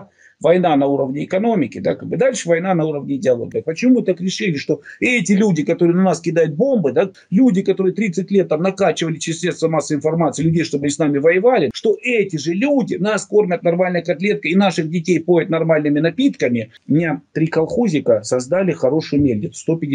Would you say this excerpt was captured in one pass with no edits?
no; 4 cuts; at 3.5 s, 7.1 s, 11.7 s, 16.7 s

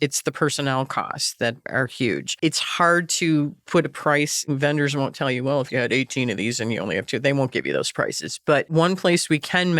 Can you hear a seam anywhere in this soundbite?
yes; 3 cuts; at 1.8 s, 4.4 s, 8.7 s

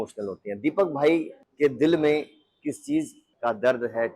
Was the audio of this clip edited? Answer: yes; 2 cuts; at 1.4 s, 3.2 s

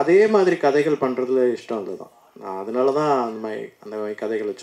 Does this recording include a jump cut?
no; 0 cuts

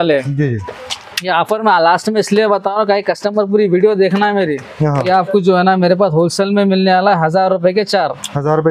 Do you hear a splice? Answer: yes; 1 cut; at 5.0 s

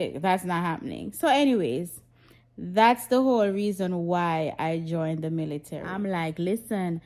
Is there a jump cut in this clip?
yes; 1 cut; at 5.8 s

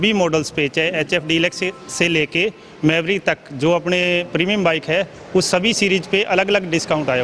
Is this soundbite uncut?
yes; 0 cuts

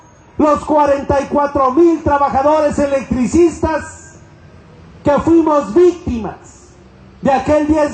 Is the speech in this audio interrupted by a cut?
yes; 1 cut; at 1.8 s

